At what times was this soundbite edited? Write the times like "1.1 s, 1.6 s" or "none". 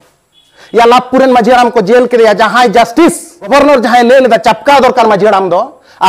3.5 s